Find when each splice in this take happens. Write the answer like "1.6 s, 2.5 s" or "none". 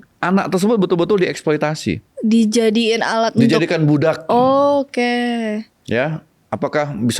2.1 s